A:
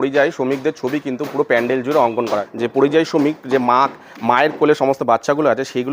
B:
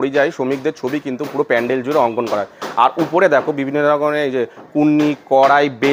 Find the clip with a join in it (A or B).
A